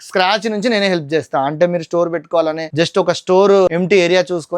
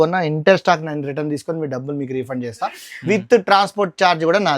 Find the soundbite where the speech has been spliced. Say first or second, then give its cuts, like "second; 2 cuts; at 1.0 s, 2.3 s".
first; 2 cuts; at 2.6 s, 3.7 s